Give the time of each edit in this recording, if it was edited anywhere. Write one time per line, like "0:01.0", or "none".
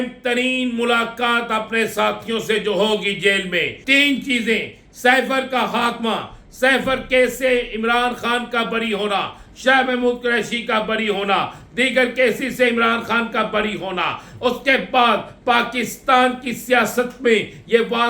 0:03.8